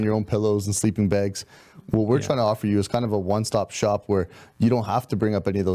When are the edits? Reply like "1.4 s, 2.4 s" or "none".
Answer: none